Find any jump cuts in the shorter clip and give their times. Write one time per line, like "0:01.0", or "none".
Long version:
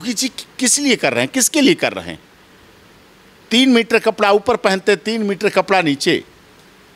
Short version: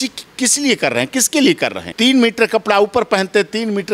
0:01.8